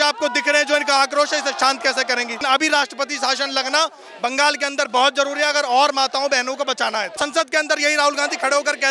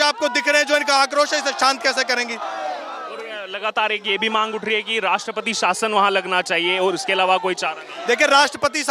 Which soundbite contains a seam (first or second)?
first